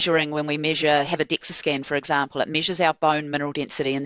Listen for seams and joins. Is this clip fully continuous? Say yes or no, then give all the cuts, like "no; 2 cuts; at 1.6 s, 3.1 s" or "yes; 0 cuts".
yes; 0 cuts